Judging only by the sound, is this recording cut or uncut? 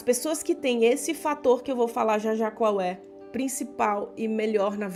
uncut